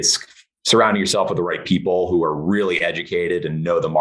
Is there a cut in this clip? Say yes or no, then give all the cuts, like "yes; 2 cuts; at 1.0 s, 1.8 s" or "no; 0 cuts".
no; 0 cuts